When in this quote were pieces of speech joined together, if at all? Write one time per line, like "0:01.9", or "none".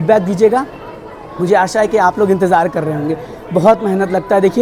none